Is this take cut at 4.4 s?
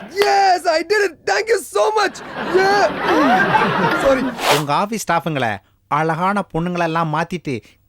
yes; 1 cut; at 4.4 s

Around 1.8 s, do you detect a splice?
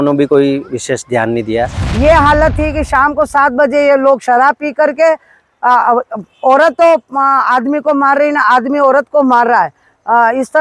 yes; 1 cut; at 1.8 s

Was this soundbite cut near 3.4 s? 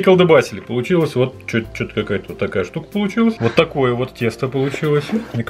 yes; 1 cut; at 3.4 s

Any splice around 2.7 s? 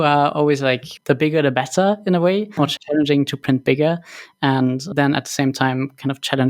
yes; 2 cuts; at 0.9 s, 2.7 s

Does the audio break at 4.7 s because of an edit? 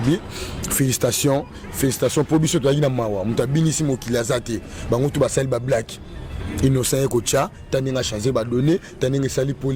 no; 0 cuts

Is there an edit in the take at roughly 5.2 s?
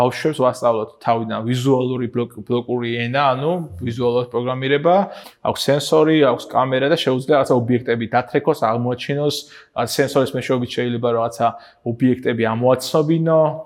yes; 1 cut; at 5.2 s

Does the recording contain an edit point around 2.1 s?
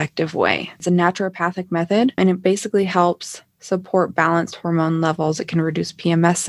yes; 2 cuts; at 0.8 s, 2.1 s

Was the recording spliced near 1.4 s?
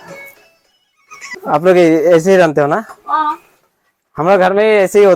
yes; 1 cut; at 1.4 s

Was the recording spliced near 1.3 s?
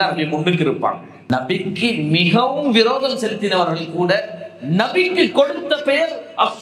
yes; 1 cut; at 1.3 s

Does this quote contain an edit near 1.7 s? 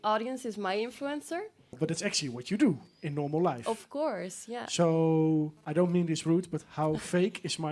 yes; 1 cut; at 1.7 s

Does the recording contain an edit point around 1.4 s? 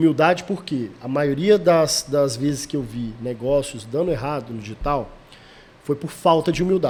no; 0 cuts

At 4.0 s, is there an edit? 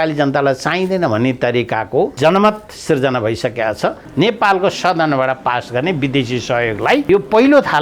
yes; 3 cuts; at 2.1 s, 4.0 s, 7.1 s

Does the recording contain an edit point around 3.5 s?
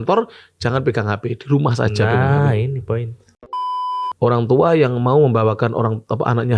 yes; 1 cut; at 3.5 s

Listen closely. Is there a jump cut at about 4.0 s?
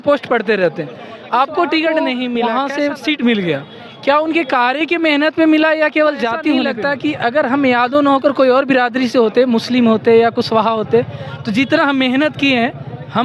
no; 2 cuts; at 2.4 s, 6.7 s

